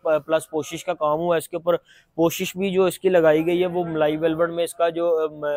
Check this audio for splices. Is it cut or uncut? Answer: uncut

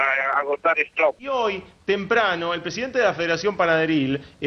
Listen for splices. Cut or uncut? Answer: cut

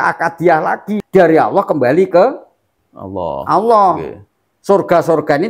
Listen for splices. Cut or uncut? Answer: cut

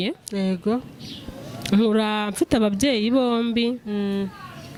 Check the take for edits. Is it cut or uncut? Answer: uncut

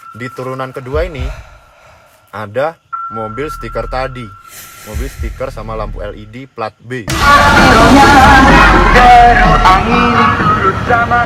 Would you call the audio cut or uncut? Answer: uncut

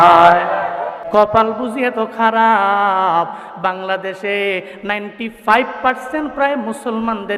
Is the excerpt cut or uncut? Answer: cut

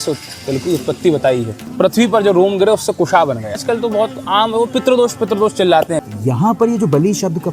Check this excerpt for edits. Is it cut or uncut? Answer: cut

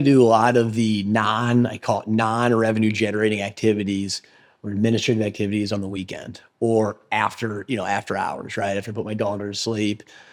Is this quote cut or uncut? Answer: uncut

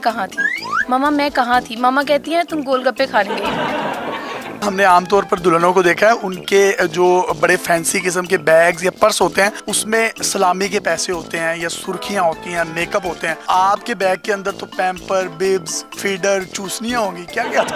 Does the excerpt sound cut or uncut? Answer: cut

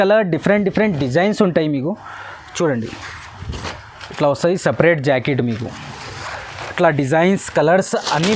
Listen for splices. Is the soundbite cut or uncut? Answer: uncut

